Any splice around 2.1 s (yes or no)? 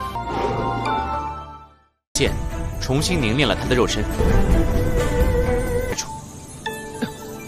yes